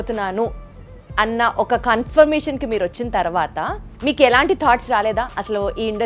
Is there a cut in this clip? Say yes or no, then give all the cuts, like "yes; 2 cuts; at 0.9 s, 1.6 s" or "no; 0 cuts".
yes; 1 cut; at 3.8 s